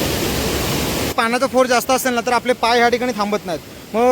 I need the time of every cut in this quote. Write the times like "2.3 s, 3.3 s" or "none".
1.1 s